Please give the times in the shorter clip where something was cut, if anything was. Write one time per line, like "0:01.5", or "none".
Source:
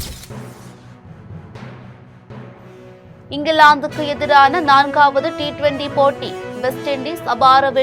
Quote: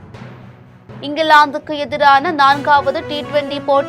0:01.0